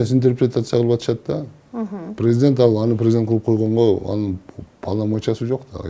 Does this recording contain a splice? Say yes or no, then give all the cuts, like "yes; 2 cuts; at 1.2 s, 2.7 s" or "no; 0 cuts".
no; 0 cuts